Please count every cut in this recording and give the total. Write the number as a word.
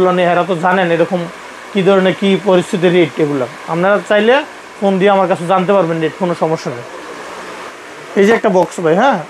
zero